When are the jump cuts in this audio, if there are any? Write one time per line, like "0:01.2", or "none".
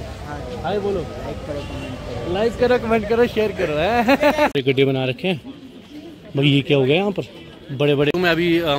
0:04.5
0:08.1